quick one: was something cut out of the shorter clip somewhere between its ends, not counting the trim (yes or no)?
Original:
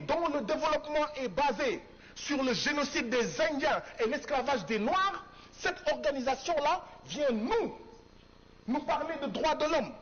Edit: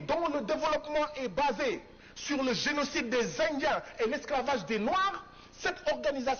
no